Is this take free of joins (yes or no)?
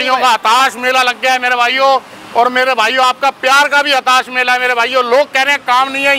yes